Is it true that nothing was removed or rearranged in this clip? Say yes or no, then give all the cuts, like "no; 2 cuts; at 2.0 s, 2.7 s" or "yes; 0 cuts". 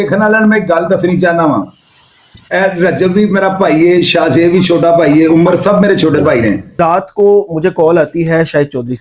no; 1 cut; at 6.7 s